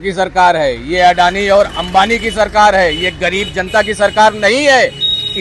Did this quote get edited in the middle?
no; 0 cuts

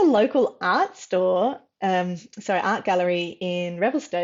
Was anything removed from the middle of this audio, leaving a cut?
no; 0 cuts

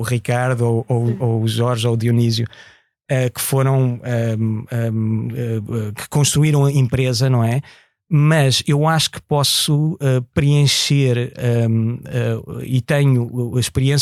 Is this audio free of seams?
yes; 0 cuts

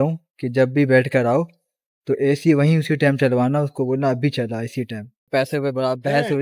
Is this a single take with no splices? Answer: no; 1 cut; at 5.3 s

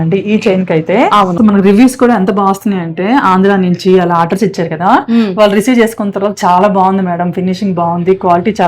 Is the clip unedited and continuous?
no; 1 cut; at 1.3 s

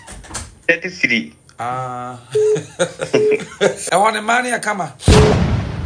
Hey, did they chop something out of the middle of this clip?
yes; 1 cut; at 3.8 s

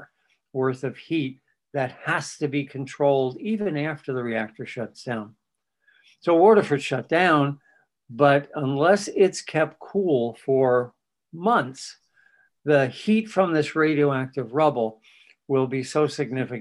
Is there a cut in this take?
no; 0 cuts

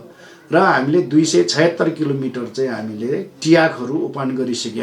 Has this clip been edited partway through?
no; 0 cuts

